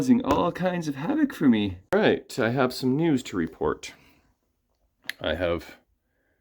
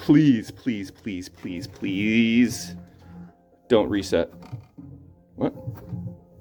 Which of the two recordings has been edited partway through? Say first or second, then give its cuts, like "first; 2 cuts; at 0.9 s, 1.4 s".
first; 1 cut; at 1.8 s